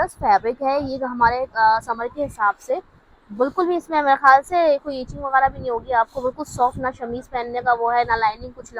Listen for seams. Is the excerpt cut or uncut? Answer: uncut